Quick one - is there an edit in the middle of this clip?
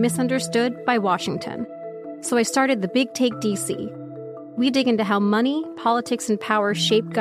no; 0 cuts

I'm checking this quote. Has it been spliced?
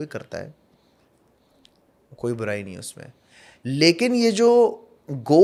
no; 0 cuts

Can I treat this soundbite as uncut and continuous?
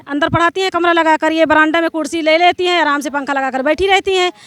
yes; 0 cuts

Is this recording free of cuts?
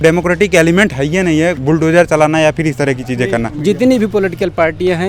no; 2 cuts; at 1.6 s, 3.5 s

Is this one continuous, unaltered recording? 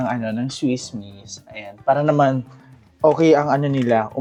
yes; 0 cuts

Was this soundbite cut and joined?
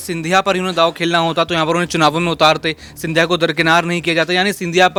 no; 0 cuts

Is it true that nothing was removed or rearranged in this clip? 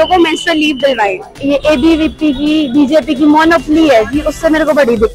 no; 1 cut; at 1.4 s

